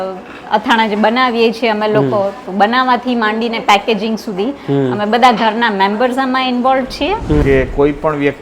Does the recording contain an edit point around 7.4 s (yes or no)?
yes